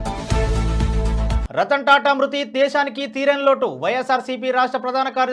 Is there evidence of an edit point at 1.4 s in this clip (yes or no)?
yes